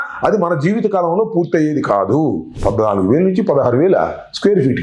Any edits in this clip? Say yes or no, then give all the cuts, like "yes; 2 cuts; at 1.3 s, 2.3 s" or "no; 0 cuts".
yes; 1 cut; at 2.6 s